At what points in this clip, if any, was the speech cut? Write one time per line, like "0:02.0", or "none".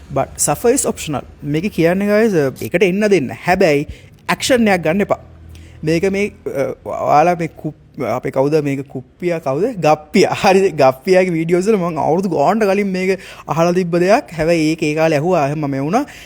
0:02.6